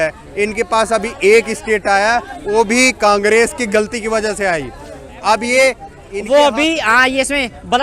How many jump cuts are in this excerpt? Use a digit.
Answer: 1